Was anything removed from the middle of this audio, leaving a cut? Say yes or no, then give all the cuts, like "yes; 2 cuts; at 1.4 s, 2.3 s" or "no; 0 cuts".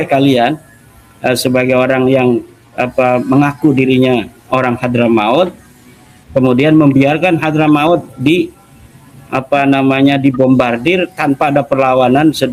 no; 0 cuts